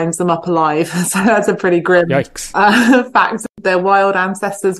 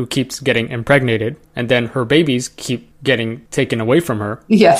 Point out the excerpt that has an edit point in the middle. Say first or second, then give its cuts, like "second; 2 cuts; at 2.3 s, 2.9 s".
first; 2 cuts; at 2.4 s, 3.5 s